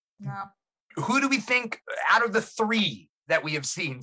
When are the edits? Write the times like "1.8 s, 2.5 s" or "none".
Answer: 1.7 s